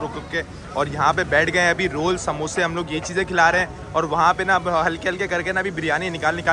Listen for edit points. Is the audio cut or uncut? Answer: uncut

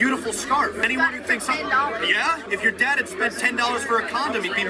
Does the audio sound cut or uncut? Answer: cut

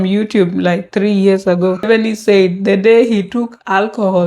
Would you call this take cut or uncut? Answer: cut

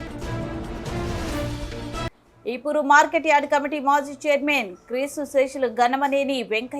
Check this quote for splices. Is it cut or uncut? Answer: cut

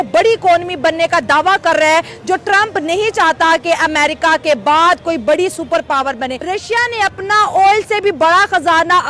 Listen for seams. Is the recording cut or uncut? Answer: cut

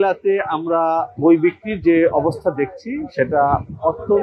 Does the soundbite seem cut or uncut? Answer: uncut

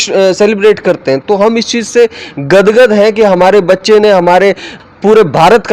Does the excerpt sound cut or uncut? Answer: cut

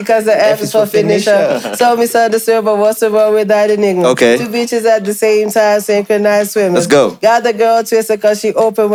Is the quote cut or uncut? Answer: uncut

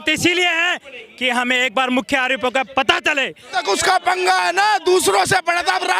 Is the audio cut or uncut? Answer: cut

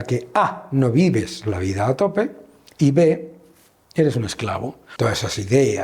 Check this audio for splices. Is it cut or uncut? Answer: cut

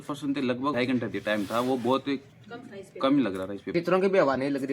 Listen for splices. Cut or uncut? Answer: cut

